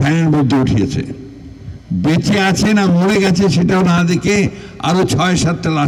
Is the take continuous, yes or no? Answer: yes